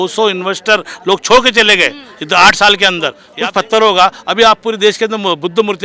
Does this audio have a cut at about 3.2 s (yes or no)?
yes